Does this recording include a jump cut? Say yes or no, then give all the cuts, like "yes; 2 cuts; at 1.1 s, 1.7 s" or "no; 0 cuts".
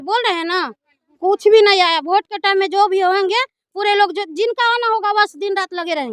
no; 0 cuts